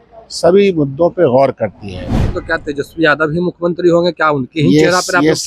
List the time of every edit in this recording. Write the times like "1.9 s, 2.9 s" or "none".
2.3 s